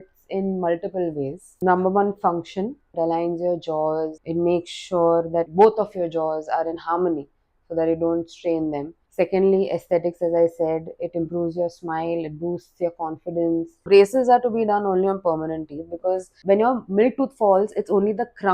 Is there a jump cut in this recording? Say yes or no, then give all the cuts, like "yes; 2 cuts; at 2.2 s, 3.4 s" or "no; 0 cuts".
yes; 7 cuts; at 1.6 s, 2.9 s, 4.2 s, 5.5 s, 9.0 s, 13.7 s, 16.4 s